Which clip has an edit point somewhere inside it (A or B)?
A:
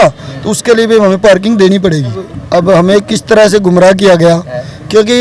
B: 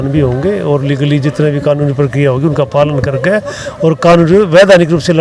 A